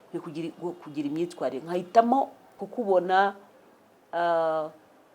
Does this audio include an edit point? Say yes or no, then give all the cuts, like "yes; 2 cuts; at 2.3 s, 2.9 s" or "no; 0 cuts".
yes; 1 cut; at 2.6 s